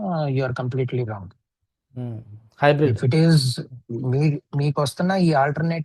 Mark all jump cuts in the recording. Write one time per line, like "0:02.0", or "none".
none